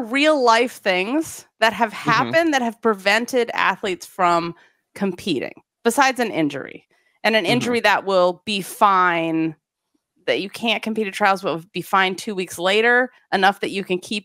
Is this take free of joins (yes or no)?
yes